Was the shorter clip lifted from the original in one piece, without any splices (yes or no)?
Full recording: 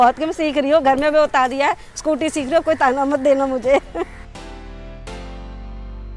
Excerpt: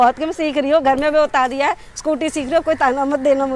yes